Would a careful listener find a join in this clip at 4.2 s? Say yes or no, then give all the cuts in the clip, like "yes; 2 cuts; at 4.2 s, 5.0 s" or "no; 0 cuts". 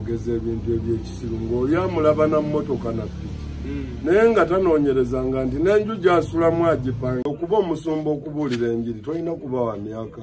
no; 1 cut; at 7.2 s